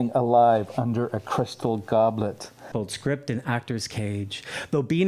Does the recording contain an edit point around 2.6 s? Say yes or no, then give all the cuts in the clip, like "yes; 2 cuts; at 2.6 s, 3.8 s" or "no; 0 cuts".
yes; 1 cut; at 2.6 s